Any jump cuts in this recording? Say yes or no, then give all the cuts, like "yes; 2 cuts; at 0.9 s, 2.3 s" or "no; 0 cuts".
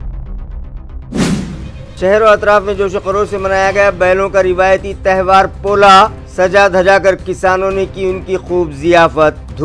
yes; 1 cut; at 1.6 s